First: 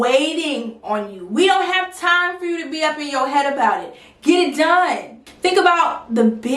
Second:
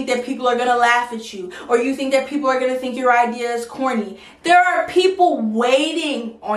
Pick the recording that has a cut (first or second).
first